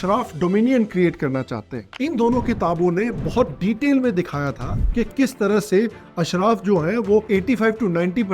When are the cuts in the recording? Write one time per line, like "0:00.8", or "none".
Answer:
0:01.9